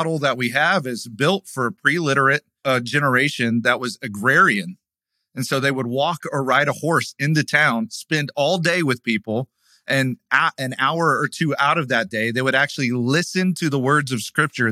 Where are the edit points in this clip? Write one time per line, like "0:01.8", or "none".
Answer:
0:02.5